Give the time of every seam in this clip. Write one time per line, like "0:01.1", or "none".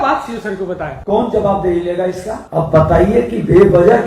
0:00.9
0:02.3